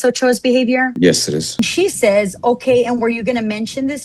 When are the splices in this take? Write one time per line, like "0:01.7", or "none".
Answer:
0:01.6